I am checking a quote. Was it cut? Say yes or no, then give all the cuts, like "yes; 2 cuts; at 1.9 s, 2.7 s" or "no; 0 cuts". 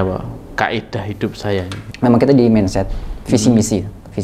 yes; 1 cut; at 1.8 s